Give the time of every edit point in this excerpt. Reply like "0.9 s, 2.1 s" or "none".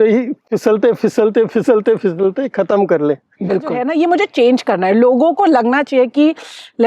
3.8 s